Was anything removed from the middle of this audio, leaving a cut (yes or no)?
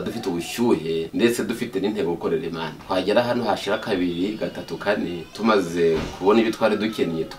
yes